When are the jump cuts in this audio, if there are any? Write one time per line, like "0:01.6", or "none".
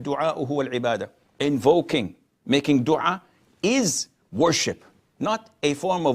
0:01.2